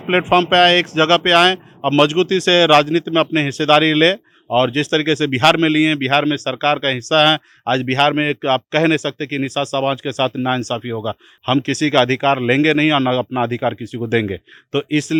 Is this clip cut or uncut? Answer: uncut